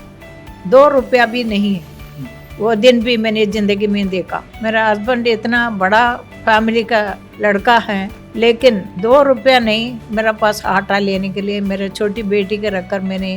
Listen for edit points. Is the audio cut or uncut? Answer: cut